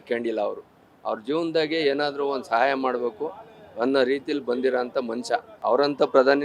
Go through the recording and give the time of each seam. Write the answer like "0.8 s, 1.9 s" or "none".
5.5 s